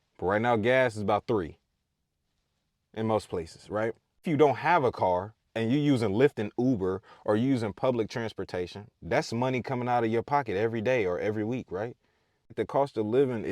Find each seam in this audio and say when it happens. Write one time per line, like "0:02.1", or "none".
0:04.2
0:12.5